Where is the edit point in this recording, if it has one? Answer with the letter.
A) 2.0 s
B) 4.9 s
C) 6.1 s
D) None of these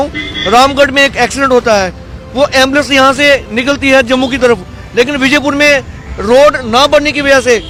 D